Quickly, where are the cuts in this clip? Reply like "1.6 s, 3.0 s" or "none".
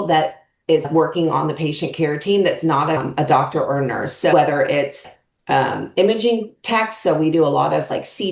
0.9 s, 3.0 s